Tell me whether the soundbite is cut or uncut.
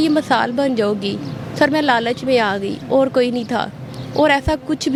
uncut